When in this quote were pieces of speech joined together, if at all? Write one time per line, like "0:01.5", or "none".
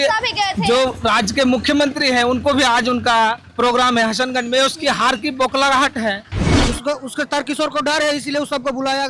0:06.3